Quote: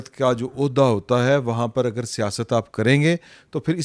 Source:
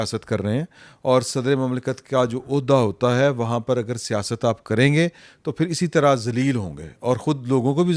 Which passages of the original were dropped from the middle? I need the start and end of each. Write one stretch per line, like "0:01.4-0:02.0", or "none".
none